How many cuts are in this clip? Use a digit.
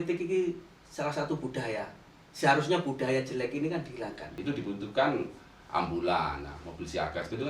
1